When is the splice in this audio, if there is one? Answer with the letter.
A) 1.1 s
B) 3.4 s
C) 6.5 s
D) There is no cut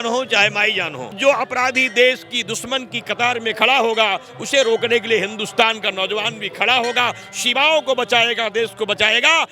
A